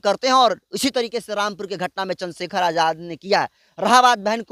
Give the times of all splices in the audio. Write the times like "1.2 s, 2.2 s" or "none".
none